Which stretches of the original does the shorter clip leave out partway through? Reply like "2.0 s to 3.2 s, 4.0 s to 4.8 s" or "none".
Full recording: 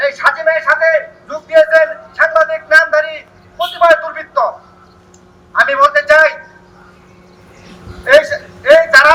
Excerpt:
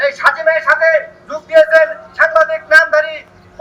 none